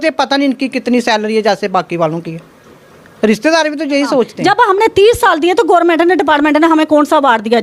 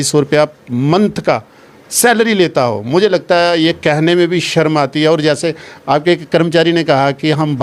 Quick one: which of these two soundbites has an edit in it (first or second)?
first